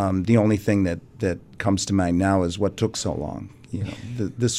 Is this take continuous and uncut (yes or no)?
yes